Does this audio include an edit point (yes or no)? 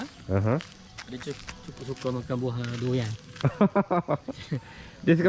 no